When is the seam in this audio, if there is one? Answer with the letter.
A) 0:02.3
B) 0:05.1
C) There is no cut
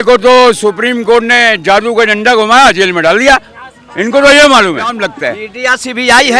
B